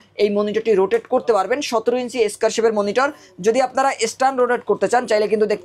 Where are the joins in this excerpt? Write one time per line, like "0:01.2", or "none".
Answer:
none